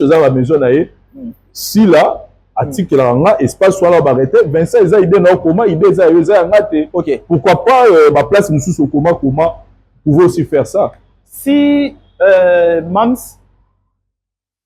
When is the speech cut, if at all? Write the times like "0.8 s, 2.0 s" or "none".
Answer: none